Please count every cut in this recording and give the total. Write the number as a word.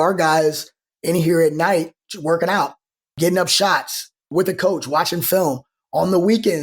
two